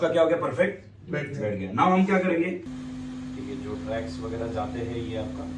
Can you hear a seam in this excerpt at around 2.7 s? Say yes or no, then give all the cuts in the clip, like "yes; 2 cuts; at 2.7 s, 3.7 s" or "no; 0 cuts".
yes; 1 cut; at 2.7 s